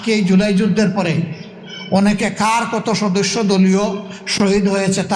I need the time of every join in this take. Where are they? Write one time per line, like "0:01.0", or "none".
none